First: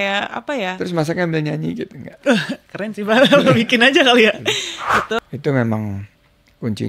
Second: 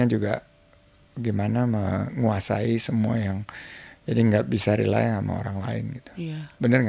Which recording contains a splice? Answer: first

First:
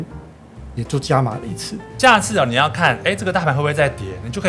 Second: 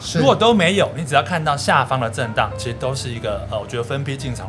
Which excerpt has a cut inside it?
first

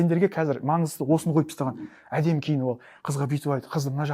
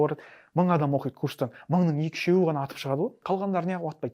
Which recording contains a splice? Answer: second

